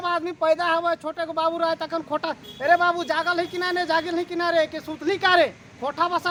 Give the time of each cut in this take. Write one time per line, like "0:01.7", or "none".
none